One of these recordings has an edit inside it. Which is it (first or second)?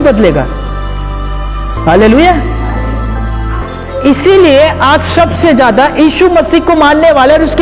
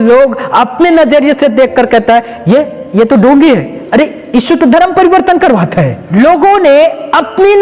second